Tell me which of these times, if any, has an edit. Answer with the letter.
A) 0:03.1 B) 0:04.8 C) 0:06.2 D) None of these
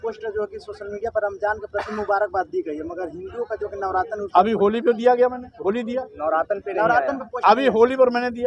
D